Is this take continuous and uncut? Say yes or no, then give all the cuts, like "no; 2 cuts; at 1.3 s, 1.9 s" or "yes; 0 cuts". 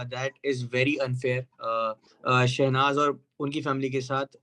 no; 1 cut; at 2.1 s